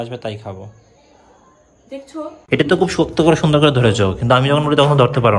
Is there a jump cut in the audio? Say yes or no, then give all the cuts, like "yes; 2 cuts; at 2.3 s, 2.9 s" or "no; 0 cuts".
yes; 1 cut; at 2.4 s